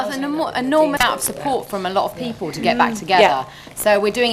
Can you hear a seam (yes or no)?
yes